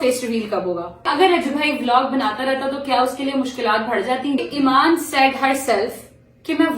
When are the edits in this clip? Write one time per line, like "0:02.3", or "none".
0:01.1
0:04.4